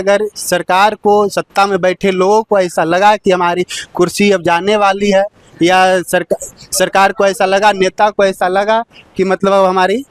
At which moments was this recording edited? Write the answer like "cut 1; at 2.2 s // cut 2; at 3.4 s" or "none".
none